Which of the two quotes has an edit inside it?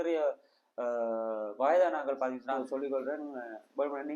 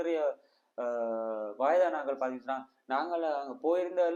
first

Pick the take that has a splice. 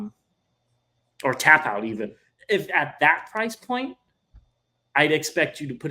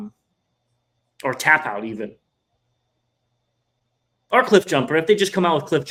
first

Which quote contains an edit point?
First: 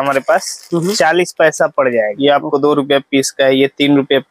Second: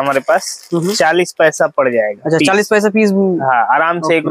first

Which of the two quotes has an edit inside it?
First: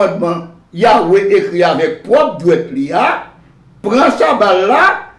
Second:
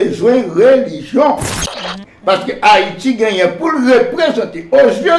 second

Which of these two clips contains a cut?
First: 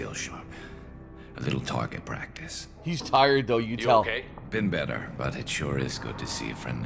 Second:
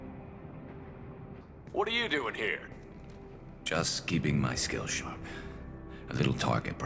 second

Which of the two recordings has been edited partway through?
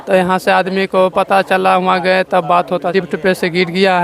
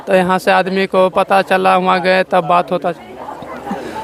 first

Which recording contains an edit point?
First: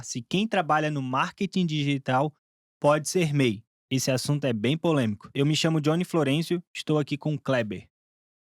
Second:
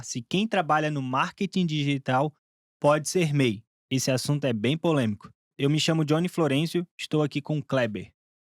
first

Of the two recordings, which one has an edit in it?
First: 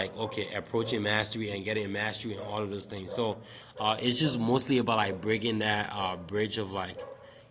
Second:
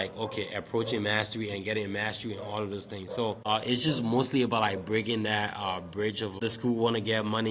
second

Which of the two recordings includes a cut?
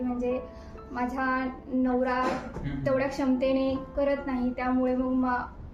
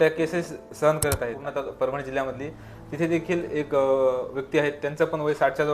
second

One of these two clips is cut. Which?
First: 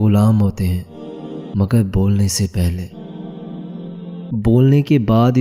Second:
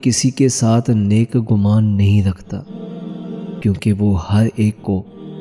first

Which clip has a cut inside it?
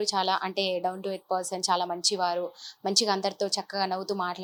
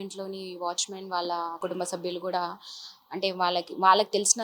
second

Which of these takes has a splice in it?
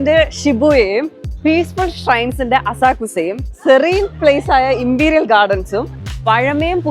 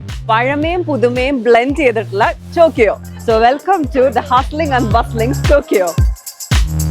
second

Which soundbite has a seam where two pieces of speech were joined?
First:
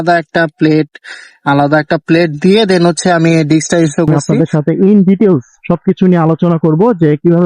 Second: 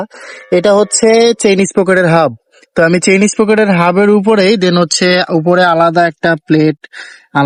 first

